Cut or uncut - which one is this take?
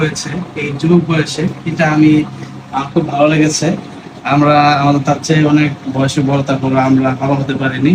uncut